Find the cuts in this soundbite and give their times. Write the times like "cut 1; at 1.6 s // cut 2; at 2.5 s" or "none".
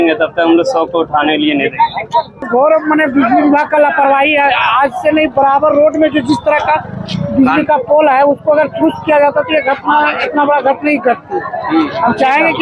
cut 1; at 2.5 s